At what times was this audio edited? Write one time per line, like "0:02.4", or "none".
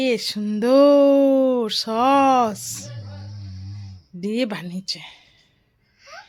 none